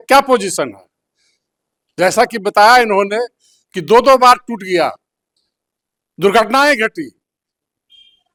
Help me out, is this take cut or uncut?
uncut